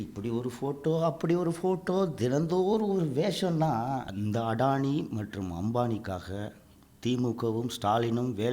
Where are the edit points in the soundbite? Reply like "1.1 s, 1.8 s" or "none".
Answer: 4.1 s